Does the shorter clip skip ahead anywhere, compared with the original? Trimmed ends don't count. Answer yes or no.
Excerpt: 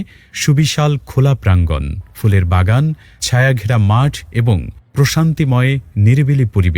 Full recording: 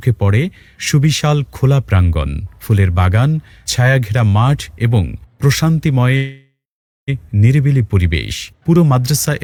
yes